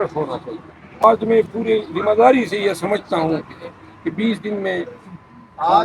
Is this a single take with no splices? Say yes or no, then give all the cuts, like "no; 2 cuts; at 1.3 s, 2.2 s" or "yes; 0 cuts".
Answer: no; 1 cut; at 1.0 s